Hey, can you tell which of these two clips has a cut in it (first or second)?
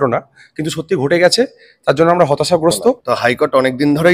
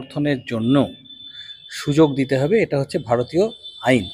first